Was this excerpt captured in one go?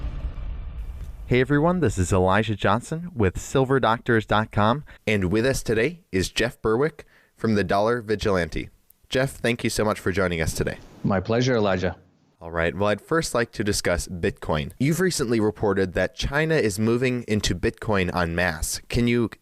yes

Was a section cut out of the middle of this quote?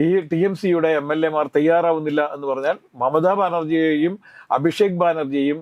no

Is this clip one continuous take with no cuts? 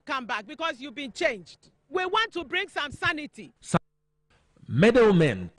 no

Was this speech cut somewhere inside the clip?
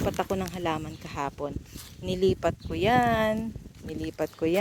no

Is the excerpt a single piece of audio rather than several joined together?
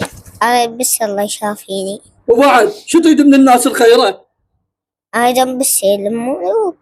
yes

